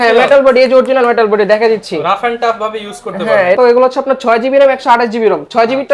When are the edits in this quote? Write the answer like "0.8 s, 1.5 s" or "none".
3.6 s